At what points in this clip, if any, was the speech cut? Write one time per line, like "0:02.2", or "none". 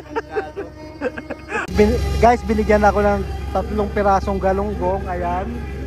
0:01.7